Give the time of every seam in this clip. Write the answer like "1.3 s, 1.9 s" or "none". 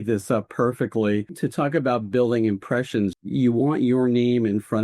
1.4 s

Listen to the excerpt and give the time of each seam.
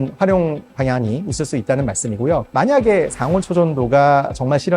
2.5 s

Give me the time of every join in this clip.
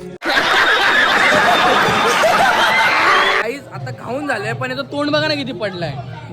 3.4 s

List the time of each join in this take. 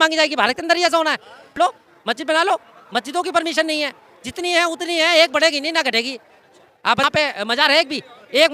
1.5 s, 7.0 s

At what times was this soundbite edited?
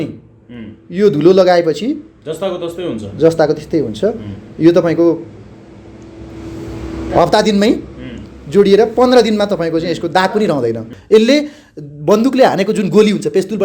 10.9 s

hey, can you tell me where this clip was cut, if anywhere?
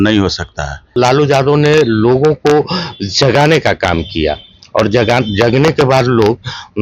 0.9 s

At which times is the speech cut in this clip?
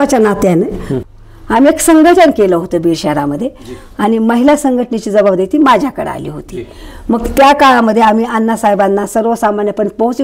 1.0 s

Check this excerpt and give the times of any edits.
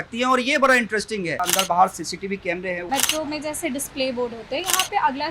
1.4 s, 2.9 s

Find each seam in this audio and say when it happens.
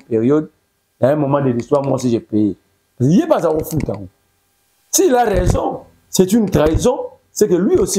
none

